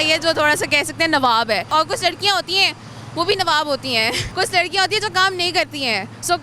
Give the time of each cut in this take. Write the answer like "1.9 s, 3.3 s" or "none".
1.7 s, 4.2 s